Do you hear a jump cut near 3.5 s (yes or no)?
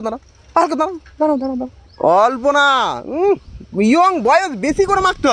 no